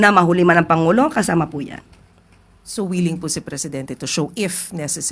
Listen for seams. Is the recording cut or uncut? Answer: uncut